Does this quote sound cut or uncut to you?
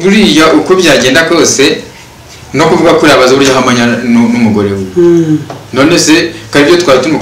uncut